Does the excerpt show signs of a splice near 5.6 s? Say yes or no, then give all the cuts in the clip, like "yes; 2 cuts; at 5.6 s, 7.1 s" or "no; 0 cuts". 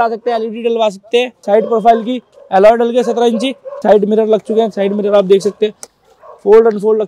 no; 2 cuts; at 1.4 s, 3.8 s